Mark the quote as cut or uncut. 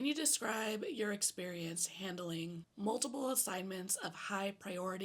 uncut